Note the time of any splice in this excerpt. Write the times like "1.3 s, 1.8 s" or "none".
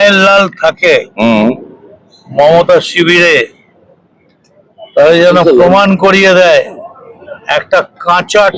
none